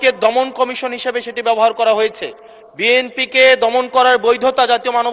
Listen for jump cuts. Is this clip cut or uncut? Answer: uncut